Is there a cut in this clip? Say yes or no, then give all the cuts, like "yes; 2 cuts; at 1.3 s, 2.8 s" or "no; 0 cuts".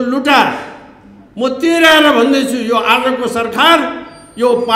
no; 0 cuts